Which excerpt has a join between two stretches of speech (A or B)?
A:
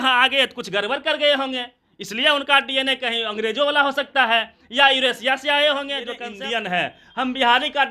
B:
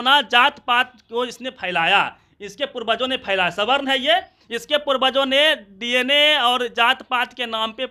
A